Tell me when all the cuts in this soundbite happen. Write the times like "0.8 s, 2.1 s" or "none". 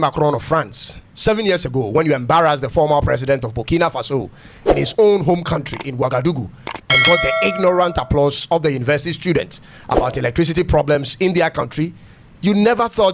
none